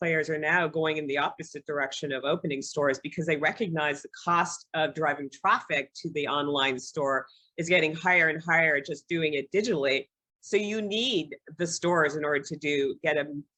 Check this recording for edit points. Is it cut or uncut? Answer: uncut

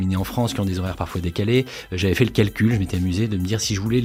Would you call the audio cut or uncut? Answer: uncut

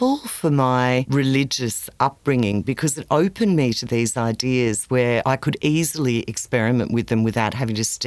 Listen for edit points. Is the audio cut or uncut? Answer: cut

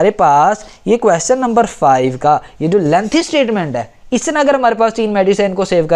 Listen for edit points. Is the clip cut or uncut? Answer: uncut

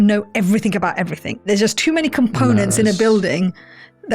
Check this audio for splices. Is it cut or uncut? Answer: cut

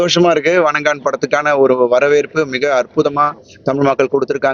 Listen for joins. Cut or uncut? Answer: uncut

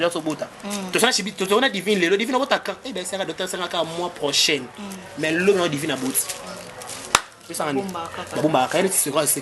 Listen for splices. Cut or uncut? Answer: uncut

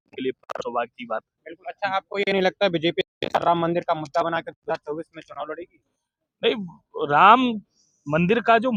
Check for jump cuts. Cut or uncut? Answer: uncut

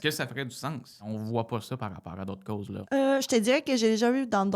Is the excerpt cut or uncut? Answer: cut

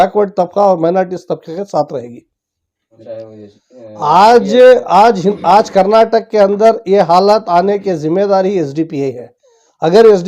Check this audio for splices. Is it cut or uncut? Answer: cut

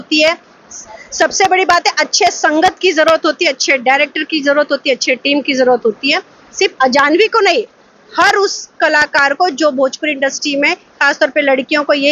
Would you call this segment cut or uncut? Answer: uncut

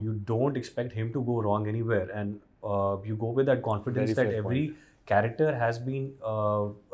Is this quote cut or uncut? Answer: uncut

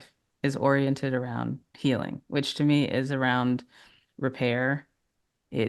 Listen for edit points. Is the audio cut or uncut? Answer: cut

